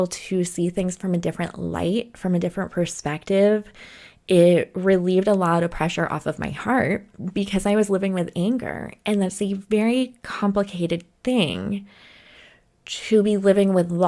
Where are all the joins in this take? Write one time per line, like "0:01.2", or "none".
none